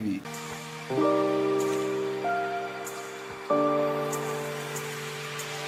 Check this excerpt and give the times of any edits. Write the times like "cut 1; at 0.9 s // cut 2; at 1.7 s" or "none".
none